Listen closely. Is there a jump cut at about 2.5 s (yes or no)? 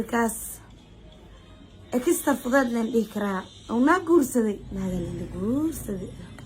no